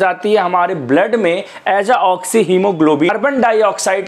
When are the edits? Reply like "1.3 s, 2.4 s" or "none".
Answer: 3.1 s